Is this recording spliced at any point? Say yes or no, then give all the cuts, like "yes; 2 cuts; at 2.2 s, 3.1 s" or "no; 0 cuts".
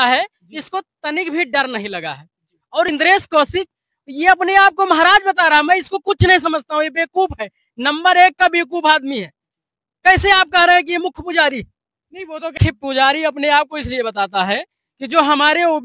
yes; 2 cuts; at 2.9 s, 12.5 s